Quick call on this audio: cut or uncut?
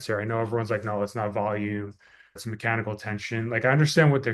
cut